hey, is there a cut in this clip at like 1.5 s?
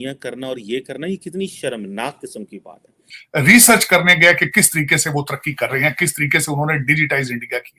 no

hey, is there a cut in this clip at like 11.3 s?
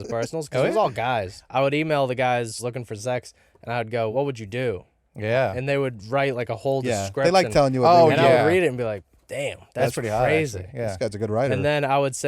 no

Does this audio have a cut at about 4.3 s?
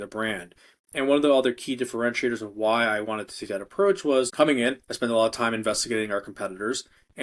yes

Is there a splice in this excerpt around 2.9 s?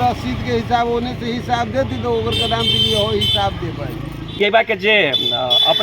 no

